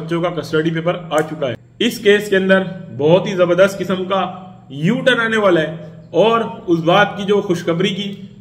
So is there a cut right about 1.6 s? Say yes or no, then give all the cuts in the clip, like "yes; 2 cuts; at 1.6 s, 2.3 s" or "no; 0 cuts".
yes; 1 cut; at 1.6 s